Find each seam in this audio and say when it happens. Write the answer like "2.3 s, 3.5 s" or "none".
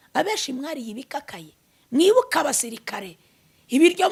none